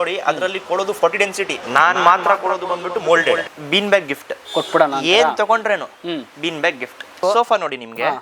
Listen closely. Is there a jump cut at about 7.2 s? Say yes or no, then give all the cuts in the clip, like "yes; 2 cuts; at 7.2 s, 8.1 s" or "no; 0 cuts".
yes; 2 cuts; at 3.4 s, 7.2 s